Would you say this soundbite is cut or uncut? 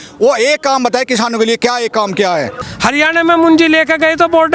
cut